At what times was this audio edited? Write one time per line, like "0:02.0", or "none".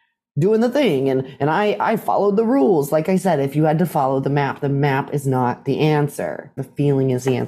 0:06.5